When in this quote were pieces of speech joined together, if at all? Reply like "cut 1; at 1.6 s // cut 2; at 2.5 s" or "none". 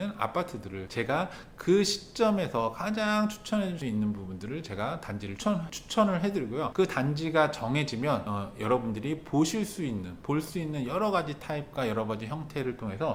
none